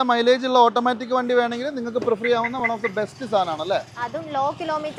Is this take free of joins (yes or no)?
yes